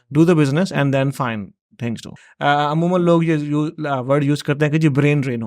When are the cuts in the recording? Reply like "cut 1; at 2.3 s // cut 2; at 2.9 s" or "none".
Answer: cut 1; at 2.2 s